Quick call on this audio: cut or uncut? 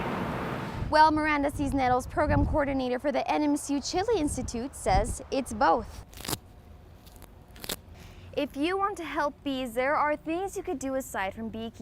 cut